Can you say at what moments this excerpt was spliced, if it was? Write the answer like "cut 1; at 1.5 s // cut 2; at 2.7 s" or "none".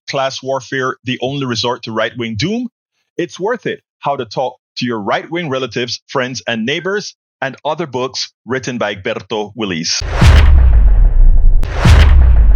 cut 1; at 10.0 s // cut 2; at 11.6 s